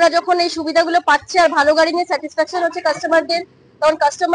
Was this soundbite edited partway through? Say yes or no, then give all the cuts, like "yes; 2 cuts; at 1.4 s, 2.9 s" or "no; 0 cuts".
no; 0 cuts